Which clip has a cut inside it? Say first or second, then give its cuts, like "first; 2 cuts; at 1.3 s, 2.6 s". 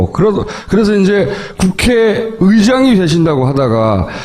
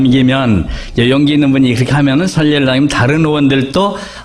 first; 1 cut; at 2.8 s